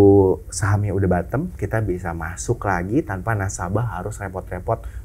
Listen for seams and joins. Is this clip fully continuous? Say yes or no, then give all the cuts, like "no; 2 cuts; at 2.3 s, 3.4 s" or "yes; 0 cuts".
yes; 0 cuts